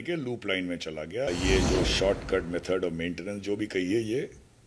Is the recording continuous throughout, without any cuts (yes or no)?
no